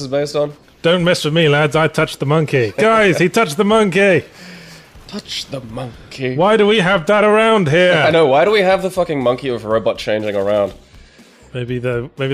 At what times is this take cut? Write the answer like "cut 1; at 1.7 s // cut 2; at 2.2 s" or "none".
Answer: cut 1; at 3.9 s